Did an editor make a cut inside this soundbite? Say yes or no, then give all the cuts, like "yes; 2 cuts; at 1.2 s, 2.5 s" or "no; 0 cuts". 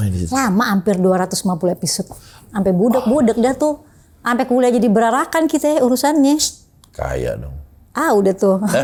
no; 0 cuts